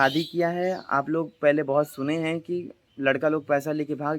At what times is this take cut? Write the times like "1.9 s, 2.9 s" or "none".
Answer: none